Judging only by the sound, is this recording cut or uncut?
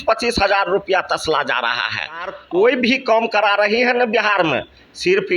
cut